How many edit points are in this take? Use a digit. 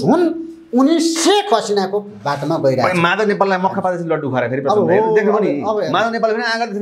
0